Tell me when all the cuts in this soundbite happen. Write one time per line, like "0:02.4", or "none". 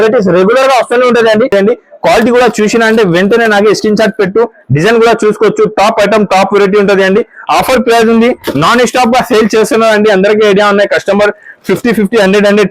0:01.5